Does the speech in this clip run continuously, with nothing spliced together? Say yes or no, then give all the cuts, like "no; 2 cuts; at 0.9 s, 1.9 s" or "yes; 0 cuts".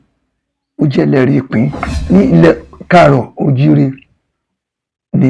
no; 1 cut; at 1.9 s